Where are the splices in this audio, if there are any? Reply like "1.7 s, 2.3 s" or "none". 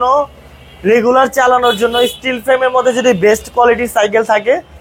none